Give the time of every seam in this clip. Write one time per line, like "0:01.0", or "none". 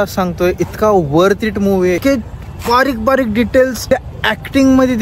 0:02.0
0:03.8